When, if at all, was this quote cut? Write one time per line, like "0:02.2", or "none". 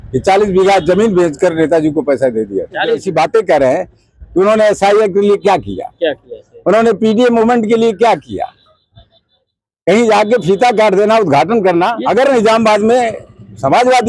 0:03.0
0:12.0